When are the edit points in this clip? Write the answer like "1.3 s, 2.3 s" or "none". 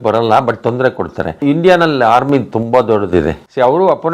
1.2 s